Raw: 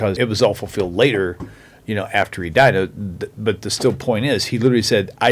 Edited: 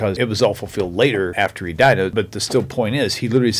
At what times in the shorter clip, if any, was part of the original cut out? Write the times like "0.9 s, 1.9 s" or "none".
1.3 s, 2.1 s